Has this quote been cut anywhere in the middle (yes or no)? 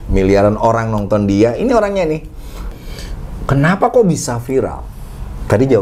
yes